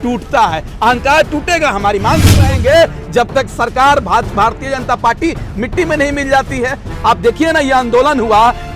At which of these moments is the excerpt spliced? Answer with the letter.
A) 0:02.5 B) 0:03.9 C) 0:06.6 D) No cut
A